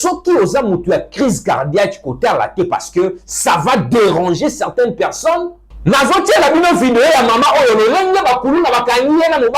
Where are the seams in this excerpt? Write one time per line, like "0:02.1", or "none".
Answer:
0:05.6

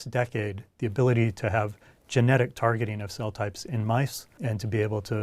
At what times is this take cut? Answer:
0:04.3

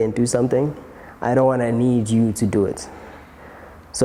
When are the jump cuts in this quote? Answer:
none

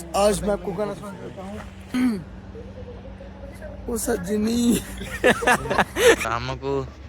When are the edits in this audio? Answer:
0:01.9
0:06.3

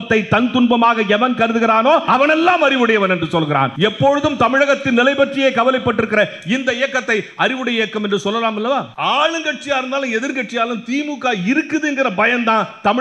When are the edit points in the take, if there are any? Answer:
0:02.0
0:03.7
0:08.9

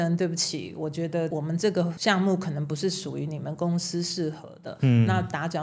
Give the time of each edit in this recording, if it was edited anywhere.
0:01.8

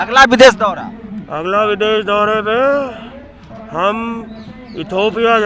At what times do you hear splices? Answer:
none

